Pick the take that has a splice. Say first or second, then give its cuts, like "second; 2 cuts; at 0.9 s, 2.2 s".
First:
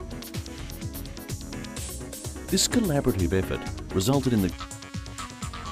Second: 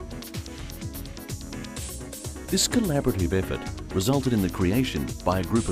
second; 1 cut; at 4.5 s